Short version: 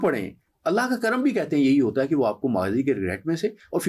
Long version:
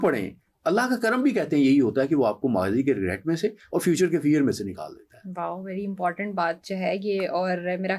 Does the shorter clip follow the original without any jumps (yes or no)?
yes